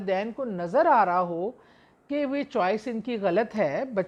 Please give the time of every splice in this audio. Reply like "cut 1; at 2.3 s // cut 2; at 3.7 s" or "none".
none